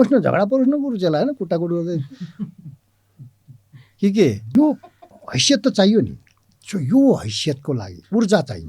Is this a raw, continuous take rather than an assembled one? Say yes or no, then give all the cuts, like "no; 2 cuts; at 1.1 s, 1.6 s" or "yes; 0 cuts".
no; 1 cut; at 4.4 s